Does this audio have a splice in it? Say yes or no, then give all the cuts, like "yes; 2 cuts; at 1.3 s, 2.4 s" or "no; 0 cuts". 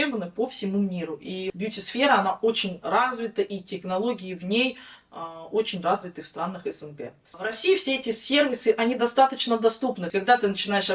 yes; 3 cuts; at 1.5 s, 7.4 s, 10.1 s